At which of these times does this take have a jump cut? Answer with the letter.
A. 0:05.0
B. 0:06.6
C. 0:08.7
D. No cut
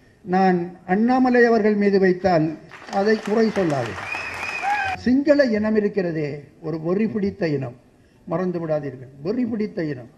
A